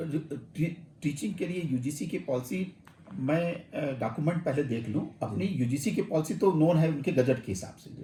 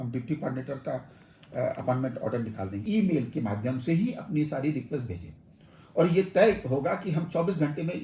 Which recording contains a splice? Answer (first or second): second